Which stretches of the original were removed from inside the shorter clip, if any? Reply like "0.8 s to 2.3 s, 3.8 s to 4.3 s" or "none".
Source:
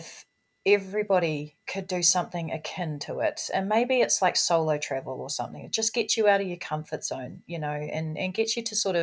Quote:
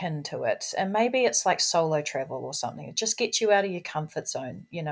none